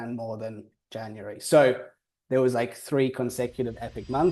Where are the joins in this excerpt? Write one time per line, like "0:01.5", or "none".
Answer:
none